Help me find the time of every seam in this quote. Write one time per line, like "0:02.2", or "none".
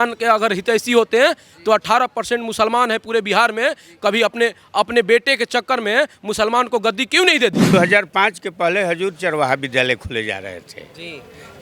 0:07.6